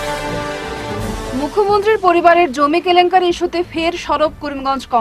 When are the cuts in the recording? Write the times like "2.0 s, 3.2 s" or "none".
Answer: 1.0 s